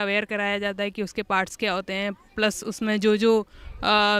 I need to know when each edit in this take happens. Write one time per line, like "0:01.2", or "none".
none